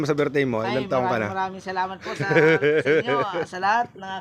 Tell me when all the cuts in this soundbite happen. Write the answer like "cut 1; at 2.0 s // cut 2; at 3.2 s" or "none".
none